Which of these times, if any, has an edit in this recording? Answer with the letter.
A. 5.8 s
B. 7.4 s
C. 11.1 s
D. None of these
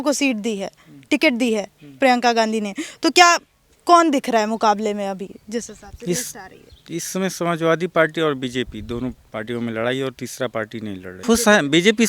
C